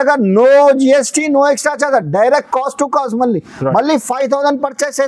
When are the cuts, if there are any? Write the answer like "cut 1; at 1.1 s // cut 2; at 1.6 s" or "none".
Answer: none